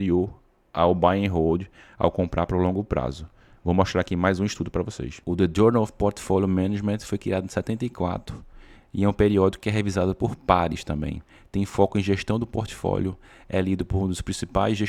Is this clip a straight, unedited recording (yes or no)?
yes